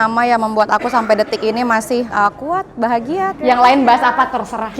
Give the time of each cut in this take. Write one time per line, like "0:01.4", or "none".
0:03.3